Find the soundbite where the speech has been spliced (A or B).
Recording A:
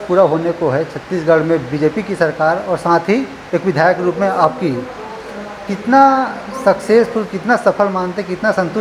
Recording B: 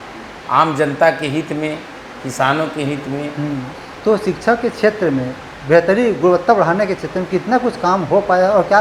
B